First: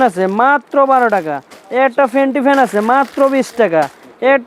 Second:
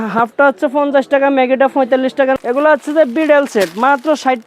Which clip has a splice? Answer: second; 1 cut; at 2.4 s

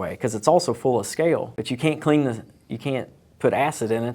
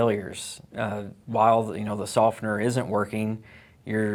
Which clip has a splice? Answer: first; 1 cut; at 1.6 s

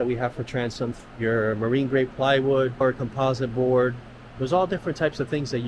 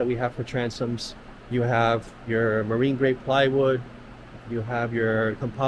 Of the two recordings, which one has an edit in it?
first; 2 cuts; at 1.1 s, 3.0 s

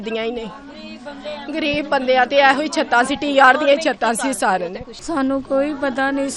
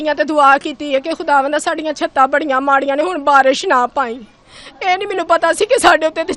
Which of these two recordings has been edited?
first; 1 cut; at 4.9 s

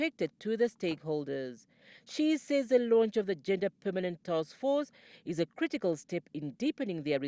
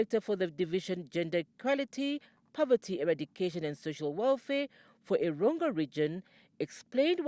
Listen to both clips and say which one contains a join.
first; 1 cut; at 1.6 s

